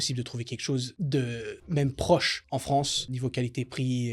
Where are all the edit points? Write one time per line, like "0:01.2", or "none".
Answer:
0:00.9
0:01.6
0:02.8